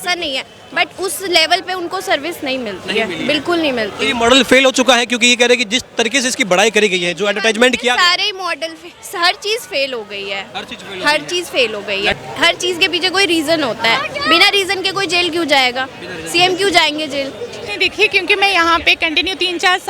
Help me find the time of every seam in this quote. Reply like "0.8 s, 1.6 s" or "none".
12.1 s, 17.6 s